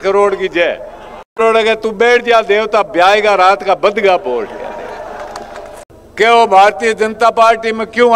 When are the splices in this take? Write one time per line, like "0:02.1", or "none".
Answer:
0:05.8